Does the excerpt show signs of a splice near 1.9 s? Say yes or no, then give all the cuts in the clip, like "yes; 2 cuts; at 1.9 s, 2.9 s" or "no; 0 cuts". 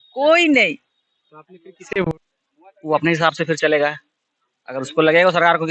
yes; 1 cut; at 1.9 s